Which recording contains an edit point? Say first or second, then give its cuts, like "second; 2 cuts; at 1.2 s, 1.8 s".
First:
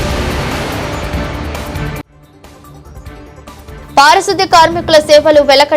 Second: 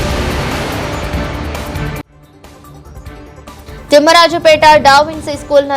first; 1 cut; at 3.6 s